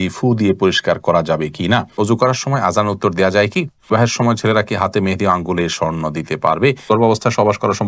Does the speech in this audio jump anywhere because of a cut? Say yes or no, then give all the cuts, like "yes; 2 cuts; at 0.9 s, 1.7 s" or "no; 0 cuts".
yes; 3 cuts; at 1.9 s, 3.9 s, 6.9 s